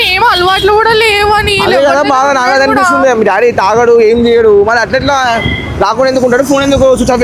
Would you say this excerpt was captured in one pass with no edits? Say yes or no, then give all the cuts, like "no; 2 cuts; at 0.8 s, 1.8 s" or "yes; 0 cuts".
yes; 0 cuts